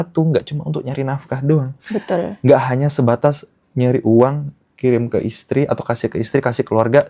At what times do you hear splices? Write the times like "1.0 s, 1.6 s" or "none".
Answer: none